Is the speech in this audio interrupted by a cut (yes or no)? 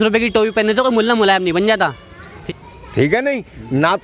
yes